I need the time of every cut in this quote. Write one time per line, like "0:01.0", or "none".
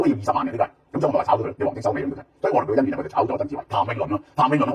0:03.6